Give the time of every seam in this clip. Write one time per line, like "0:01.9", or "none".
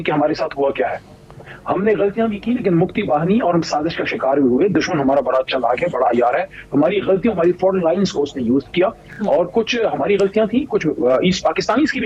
none